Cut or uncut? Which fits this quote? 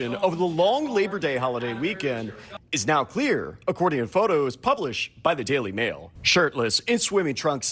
uncut